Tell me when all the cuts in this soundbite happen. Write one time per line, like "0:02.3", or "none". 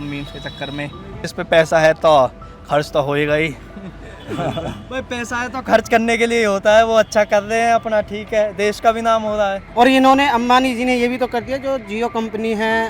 0:01.3
0:09.6